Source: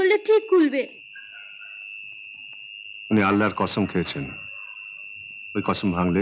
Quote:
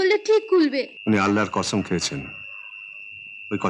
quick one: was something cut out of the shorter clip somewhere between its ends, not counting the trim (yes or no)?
yes